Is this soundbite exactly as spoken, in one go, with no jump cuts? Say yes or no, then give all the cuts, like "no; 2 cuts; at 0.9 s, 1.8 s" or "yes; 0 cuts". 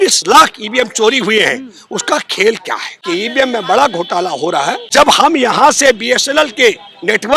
no; 2 cuts; at 2.9 s, 4.8 s